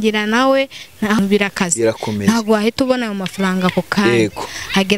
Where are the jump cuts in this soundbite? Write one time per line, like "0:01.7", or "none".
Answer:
0:01.2